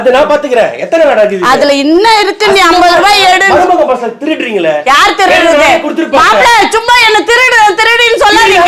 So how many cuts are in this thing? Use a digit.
0